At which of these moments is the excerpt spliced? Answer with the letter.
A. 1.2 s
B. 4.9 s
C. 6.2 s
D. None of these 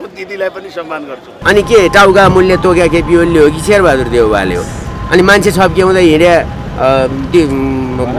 A